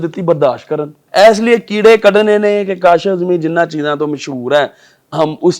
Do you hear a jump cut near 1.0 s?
yes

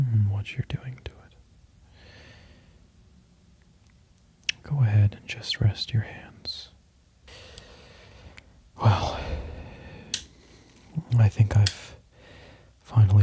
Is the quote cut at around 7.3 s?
yes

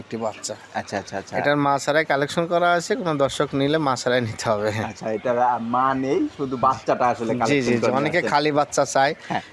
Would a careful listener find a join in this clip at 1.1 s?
no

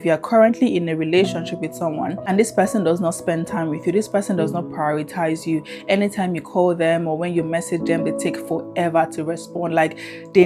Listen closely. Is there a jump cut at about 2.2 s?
yes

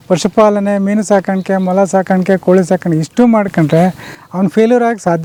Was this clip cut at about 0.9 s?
no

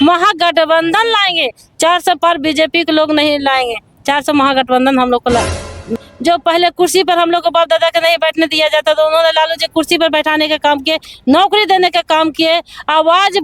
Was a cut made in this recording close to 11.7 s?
no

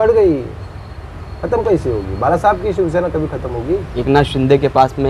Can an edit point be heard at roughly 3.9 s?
yes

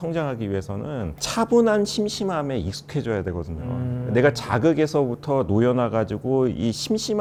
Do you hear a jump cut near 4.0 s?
no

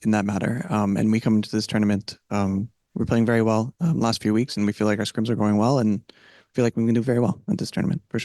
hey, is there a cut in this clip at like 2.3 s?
no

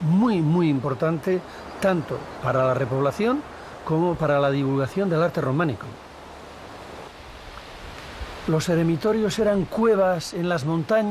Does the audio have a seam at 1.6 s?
no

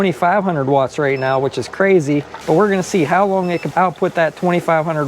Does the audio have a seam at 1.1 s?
no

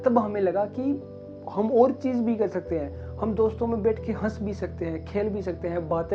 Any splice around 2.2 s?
no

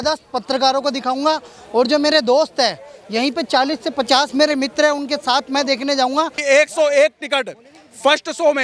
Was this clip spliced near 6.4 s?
yes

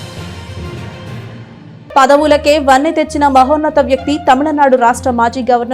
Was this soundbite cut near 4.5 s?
no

